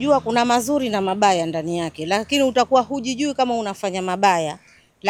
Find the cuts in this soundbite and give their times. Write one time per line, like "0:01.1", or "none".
none